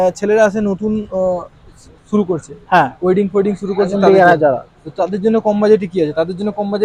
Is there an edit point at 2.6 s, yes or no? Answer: no